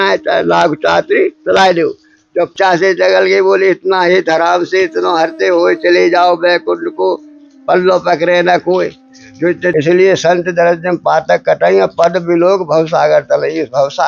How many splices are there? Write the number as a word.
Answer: two